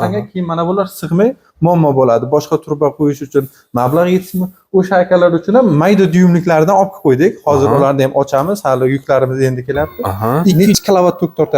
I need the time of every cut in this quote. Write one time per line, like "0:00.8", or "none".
0:10.6